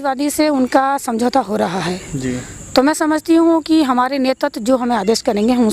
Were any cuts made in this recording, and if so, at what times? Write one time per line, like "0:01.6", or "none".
none